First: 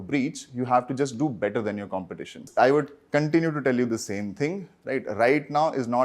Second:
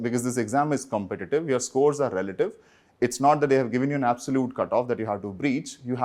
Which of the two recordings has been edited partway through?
first; 1 cut; at 2.4 s

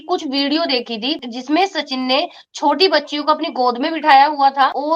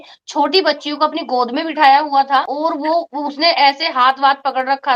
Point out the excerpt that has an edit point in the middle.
first; 1 cut; at 1.3 s

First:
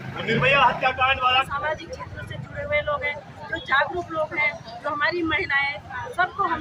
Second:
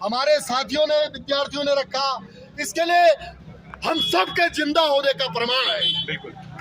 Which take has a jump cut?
first; 1 cut; at 1.5 s

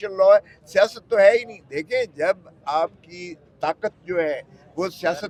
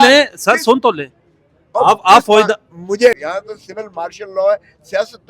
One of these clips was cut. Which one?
second; 1 cut; at 3.2 s

